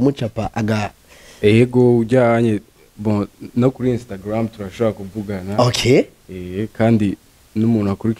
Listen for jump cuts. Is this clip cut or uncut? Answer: uncut